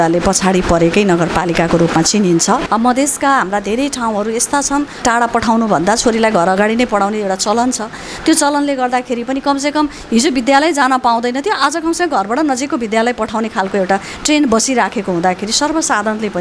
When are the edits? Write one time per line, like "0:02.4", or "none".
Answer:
0:02.6
0:05.0